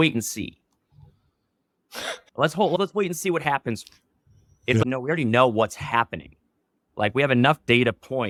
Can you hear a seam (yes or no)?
no